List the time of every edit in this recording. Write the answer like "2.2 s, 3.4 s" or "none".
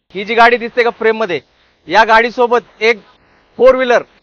none